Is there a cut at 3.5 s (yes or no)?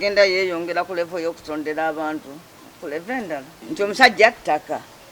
yes